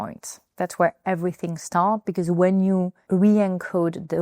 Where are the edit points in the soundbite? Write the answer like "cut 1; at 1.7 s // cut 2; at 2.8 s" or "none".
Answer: cut 1; at 3.0 s